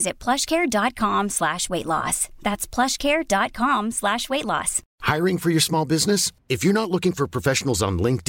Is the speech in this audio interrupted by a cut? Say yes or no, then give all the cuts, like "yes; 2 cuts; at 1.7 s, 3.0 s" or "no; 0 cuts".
yes; 1 cut; at 4.9 s